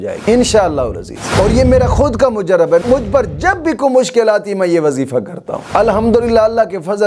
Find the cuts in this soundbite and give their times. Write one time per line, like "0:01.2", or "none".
none